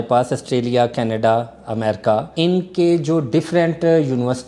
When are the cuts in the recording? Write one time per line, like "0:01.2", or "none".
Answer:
0:02.3